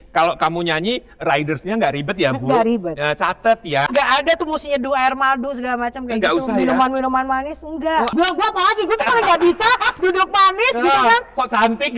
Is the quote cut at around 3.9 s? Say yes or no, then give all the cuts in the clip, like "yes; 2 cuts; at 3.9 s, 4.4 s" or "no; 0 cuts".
yes; 2 cuts; at 3.9 s, 8.1 s